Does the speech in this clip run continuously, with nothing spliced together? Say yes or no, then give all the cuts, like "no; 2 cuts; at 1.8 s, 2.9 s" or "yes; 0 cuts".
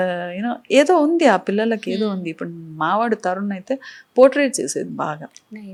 yes; 0 cuts